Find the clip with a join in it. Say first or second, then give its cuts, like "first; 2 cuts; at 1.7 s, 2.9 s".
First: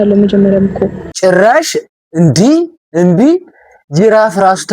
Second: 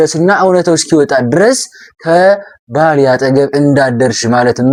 first; 1 cut; at 1.0 s